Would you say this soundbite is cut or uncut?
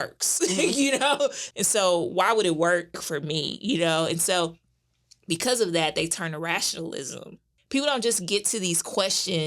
cut